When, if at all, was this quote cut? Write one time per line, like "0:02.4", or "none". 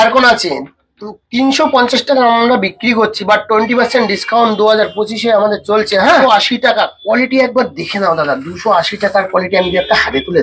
0:06.2